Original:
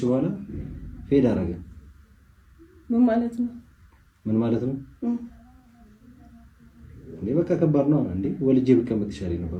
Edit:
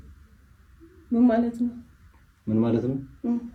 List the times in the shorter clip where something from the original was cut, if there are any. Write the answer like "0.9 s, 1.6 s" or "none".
none